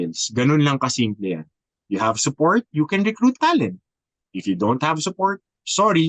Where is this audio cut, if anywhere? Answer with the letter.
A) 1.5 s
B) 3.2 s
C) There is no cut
C